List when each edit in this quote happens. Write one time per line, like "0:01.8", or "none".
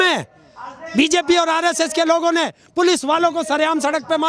none